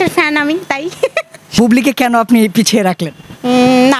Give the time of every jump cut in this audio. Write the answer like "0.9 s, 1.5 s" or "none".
1.6 s